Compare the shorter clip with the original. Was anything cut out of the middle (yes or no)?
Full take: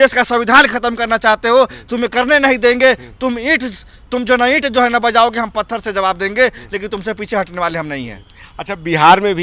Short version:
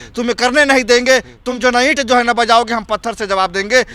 yes